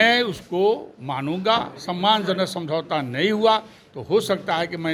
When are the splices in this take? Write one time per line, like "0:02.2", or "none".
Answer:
none